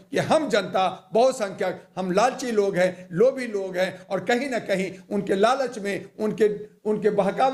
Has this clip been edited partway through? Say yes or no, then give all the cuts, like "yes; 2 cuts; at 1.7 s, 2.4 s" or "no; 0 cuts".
no; 0 cuts